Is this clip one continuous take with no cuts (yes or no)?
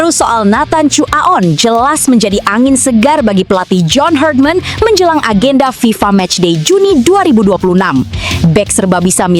yes